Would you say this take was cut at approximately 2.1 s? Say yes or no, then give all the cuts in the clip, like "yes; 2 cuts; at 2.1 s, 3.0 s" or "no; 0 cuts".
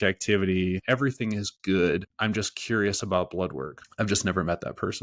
yes; 3 cuts; at 0.8 s, 2.1 s, 3.8 s